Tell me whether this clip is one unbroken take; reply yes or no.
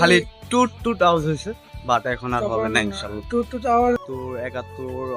no